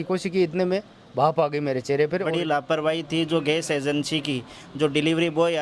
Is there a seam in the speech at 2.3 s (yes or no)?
yes